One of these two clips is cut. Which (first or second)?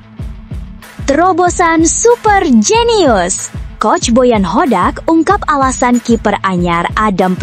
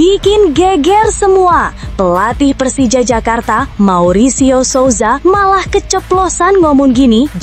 first